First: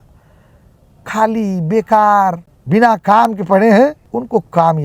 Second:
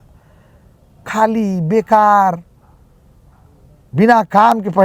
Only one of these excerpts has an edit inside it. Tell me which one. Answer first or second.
first